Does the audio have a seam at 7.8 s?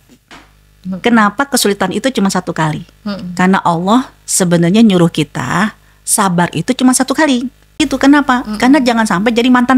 yes; 1 cut; at 7.8 s

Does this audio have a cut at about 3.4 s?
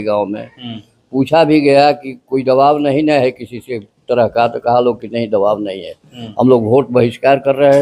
no; 0 cuts

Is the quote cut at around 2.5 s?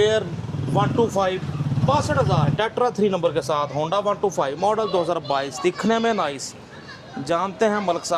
yes; 1 cut; at 2.5 s

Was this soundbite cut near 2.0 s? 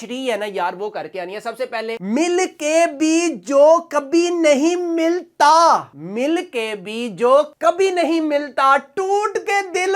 yes; 1 cut; at 2.0 s

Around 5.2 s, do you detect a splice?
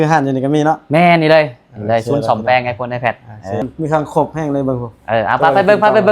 no; 1 cut; at 3.6 s

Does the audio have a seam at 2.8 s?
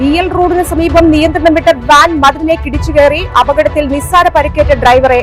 no; 0 cuts

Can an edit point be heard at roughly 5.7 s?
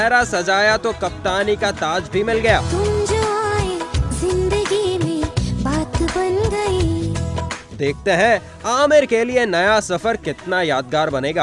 no; 2 cuts; at 2.7 s, 7.6 s

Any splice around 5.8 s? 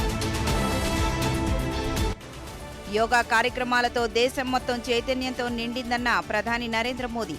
no; 1 cut; at 2.3 s

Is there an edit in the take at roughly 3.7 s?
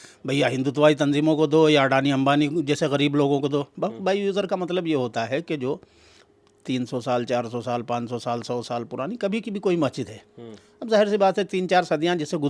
yes; 1 cut; at 3.7 s

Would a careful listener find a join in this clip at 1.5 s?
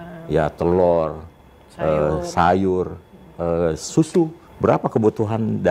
no; 1 cut; at 4.4 s

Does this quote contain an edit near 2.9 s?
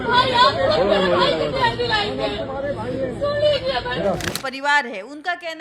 no; 1 cut; at 4.3 s

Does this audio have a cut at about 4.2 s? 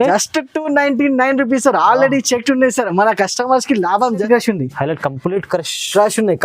yes; 1 cut; at 4.2 s

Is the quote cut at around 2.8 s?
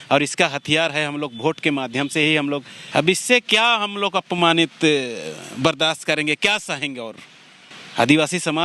yes; 1 cut; at 2.8 s

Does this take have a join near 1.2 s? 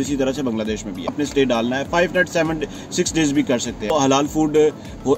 yes; 2 cuts; at 1.2 s, 3.9 s

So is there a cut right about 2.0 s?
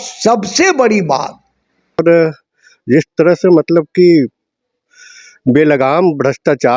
yes; 1 cut; at 2.0 s

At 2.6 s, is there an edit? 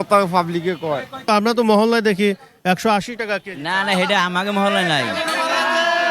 no; 1 cut; at 1.3 s

